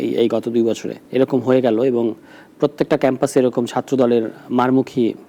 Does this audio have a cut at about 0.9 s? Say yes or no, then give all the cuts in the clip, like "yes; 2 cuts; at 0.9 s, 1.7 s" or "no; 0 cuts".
yes; 1 cut; at 0.9 s